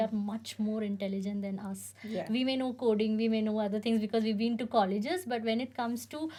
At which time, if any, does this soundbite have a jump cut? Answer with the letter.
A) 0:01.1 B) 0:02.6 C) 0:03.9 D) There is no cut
D